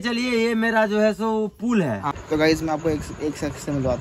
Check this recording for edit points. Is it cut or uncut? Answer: cut